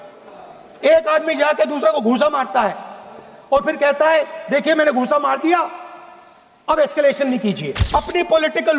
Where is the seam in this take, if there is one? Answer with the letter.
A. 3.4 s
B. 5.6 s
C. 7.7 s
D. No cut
C